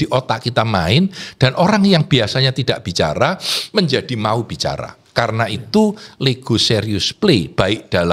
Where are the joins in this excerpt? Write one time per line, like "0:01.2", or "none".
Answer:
none